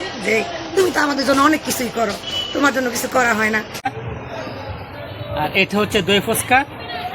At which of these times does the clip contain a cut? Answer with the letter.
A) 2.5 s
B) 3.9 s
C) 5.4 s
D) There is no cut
B